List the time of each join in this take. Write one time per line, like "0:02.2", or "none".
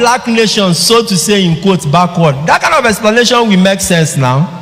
none